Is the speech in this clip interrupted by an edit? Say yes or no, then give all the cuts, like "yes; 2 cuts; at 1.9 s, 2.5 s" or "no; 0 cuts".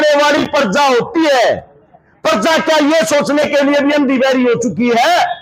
no; 0 cuts